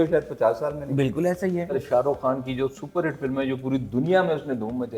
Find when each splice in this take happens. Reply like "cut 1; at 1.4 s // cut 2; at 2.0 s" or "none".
cut 1; at 1.8 s